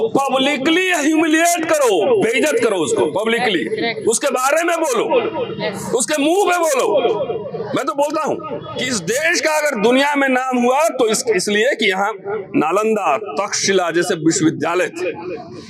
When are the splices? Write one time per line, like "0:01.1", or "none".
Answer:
0:08.8